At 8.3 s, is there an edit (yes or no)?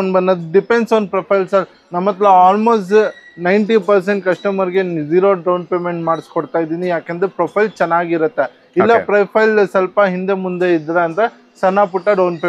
no